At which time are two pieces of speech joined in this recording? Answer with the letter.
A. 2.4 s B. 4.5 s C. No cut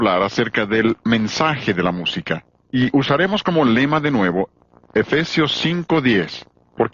A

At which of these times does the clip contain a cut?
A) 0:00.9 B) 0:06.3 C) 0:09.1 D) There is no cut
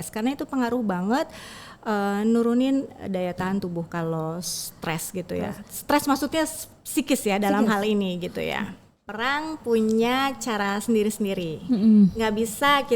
C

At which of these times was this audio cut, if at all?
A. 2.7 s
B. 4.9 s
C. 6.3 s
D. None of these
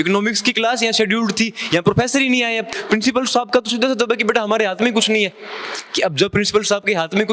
A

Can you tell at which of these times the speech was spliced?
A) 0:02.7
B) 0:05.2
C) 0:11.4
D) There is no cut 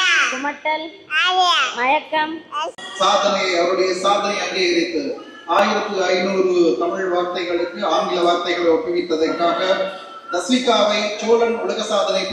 A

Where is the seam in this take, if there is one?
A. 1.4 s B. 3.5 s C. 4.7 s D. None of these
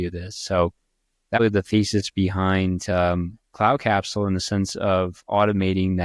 A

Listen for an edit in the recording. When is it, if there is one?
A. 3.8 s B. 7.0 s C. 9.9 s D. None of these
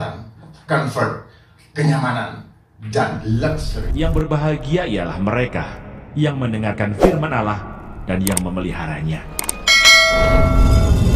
A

